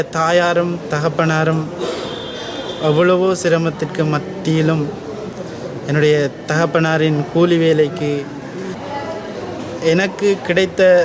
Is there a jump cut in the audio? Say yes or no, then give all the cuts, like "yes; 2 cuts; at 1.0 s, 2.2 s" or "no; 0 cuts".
yes; 1 cut; at 8.8 s